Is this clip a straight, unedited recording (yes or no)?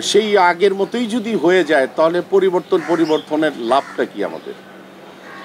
yes